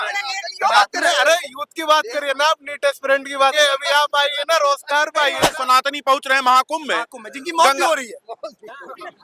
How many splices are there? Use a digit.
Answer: 2